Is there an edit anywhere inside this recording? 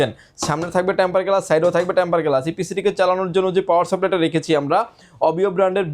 no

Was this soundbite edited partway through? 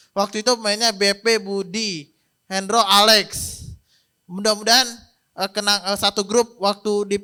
no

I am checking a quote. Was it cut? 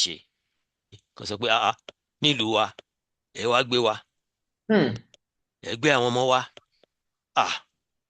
yes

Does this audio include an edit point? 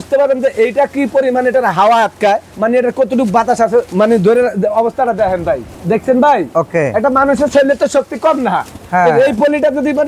no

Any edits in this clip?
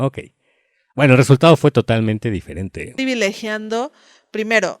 yes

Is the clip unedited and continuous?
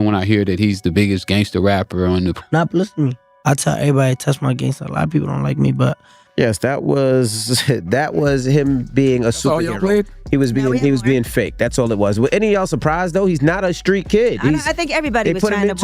no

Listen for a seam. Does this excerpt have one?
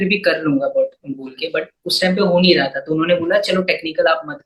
no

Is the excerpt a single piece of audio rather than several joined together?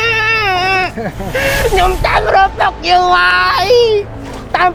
yes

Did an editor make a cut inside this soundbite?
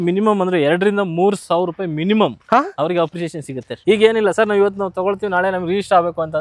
yes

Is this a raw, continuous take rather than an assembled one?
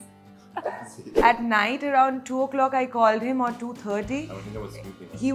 no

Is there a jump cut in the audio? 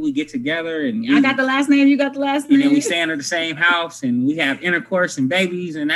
no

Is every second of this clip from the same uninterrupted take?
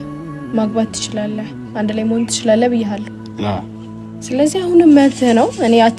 yes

